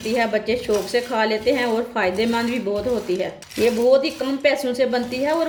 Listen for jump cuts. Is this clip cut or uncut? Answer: uncut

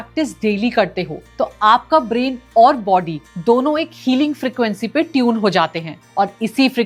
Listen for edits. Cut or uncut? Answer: uncut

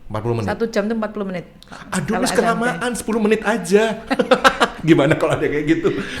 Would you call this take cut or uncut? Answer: uncut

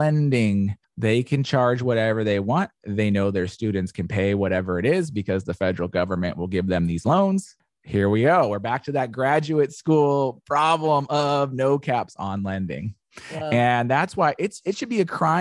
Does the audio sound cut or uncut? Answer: uncut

